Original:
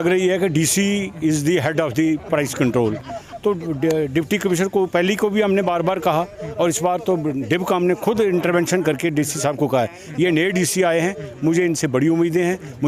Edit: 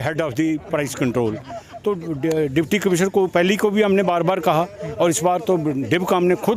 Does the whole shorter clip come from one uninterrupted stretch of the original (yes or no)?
yes